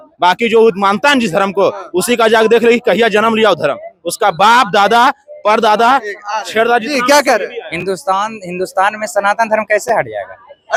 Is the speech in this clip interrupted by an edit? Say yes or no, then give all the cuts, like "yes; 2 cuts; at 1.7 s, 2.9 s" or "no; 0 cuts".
no; 0 cuts